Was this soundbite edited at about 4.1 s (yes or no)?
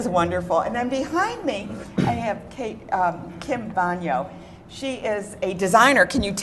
yes